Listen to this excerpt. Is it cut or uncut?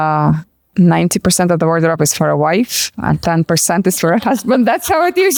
uncut